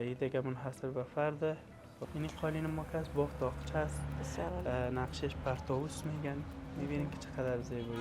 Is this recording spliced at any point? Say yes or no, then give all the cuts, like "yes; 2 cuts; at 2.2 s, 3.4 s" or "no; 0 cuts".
yes; 1 cut; at 2.0 s